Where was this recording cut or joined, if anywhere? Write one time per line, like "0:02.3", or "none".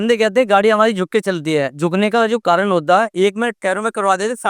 0:01.7
0:03.1